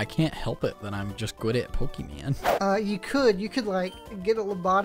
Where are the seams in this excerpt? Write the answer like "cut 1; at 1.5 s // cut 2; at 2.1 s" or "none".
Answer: cut 1; at 2.5 s